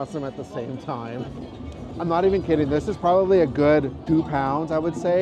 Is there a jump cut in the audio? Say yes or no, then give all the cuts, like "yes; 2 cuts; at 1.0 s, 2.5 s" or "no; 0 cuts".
yes; 2 cuts; at 1.3 s, 4.0 s